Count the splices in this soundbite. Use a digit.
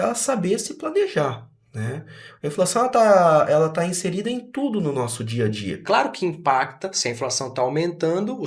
1